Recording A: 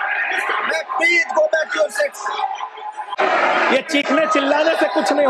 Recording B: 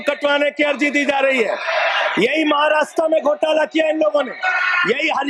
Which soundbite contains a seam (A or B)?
A